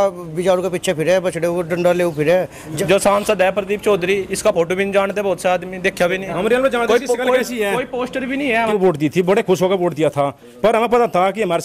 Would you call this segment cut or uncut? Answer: cut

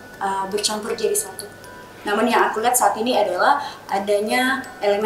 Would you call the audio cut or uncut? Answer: uncut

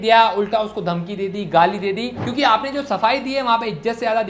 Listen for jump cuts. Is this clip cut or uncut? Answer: cut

